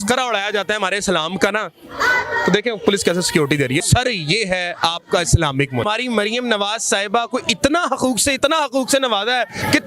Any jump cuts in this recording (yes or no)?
yes